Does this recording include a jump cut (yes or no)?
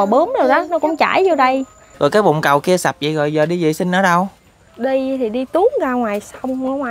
yes